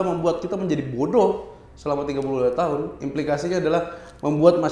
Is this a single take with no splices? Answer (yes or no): yes